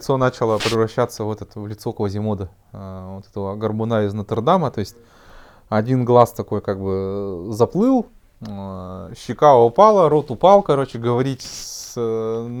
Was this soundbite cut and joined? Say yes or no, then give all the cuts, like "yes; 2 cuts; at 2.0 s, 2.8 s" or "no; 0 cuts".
no; 0 cuts